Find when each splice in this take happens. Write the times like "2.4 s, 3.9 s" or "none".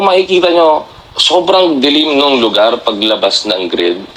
none